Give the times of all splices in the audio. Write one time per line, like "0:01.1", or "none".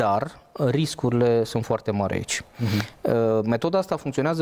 none

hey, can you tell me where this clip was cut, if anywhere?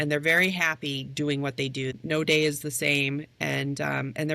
0:01.9

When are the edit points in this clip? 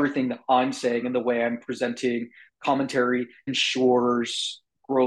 none

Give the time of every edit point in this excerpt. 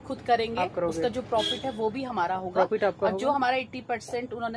none

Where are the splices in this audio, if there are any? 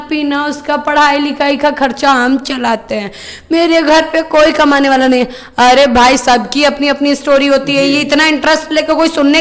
none

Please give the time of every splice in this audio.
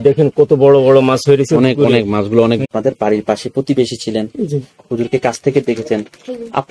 0:02.6

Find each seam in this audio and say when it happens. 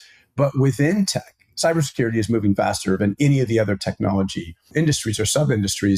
0:04.6

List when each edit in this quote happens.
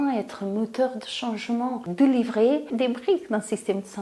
0:01.9
0:02.7

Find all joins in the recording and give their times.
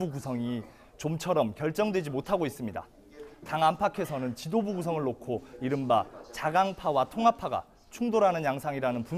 0:01.1

